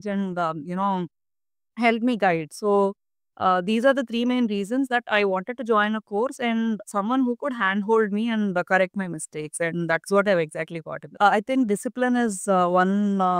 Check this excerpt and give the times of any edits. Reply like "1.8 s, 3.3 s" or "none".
11.1 s